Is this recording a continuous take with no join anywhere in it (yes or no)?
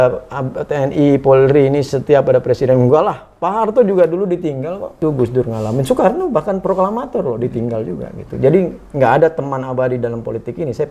no